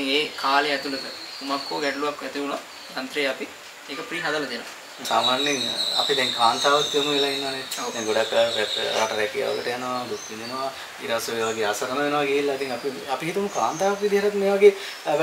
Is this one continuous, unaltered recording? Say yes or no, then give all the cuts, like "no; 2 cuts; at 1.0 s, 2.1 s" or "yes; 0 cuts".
no; 1 cut; at 5.0 s